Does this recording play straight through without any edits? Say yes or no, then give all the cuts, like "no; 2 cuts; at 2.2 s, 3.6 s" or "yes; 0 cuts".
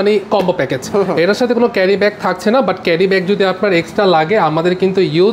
yes; 0 cuts